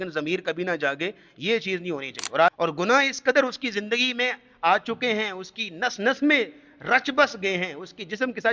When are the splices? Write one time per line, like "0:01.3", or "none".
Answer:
0:02.5